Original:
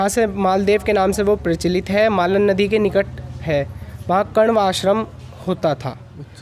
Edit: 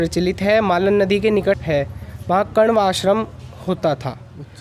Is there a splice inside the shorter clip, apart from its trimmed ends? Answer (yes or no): yes